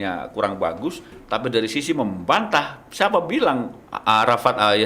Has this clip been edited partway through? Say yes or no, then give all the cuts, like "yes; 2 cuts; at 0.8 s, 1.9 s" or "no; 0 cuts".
yes; 1 cut; at 3.8 s